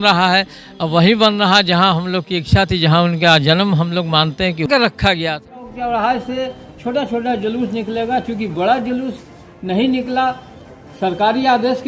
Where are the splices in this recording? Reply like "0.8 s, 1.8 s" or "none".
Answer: 4.7 s